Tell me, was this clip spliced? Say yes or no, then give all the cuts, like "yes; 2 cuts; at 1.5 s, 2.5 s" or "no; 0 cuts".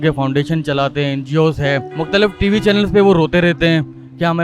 yes; 1 cut; at 1.9 s